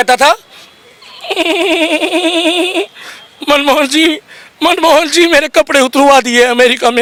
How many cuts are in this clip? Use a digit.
0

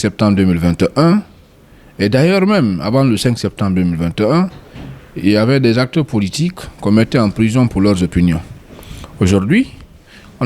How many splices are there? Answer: 0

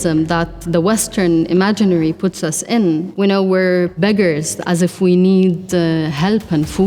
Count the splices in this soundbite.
2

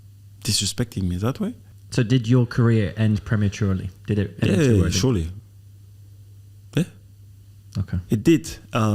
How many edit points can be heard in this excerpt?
1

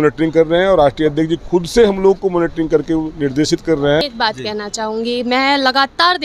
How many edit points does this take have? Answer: 1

